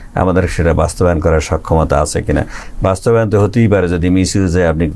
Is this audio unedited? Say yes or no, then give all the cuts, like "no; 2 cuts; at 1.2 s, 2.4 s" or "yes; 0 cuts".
yes; 0 cuts